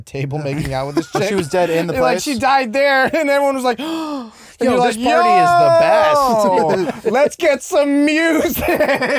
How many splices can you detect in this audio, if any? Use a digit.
0